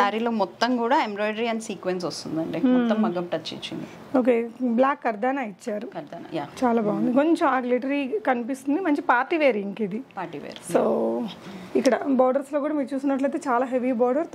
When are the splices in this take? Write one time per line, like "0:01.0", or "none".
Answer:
none